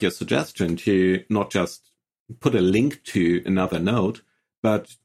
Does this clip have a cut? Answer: no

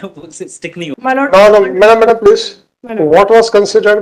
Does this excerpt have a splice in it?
yes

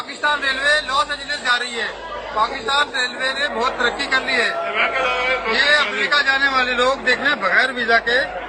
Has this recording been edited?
no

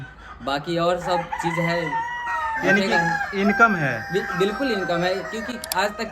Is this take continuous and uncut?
yes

